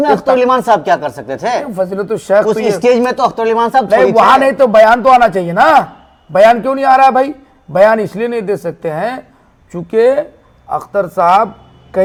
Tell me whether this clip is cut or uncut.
uncut